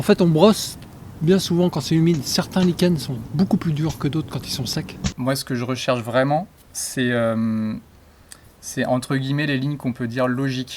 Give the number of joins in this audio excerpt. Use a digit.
1